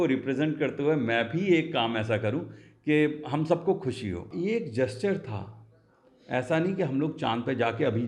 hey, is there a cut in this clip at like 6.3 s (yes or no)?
no